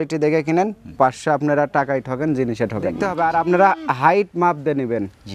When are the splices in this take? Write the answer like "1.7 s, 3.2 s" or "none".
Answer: 3.1 s

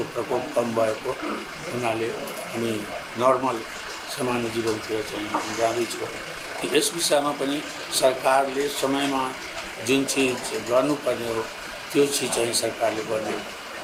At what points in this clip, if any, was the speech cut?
none

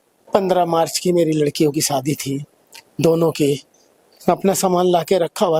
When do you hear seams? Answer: none

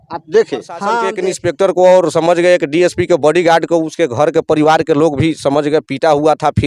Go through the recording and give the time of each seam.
1.1 s

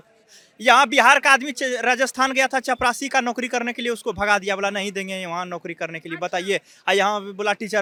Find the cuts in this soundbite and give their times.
none

